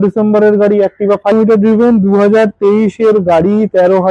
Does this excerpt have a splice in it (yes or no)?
yes